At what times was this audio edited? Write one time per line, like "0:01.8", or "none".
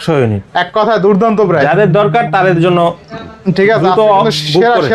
none